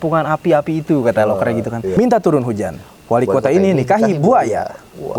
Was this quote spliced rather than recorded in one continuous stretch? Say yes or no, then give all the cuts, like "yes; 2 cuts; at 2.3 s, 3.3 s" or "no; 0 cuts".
yes; 1 cut; at 1.9 s